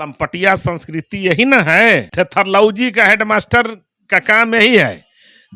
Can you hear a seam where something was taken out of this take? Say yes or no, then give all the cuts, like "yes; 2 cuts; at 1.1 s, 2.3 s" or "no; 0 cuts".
yes; 1 cut; at 2.1 s